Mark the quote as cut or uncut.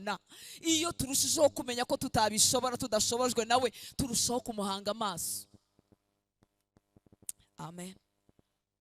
uncut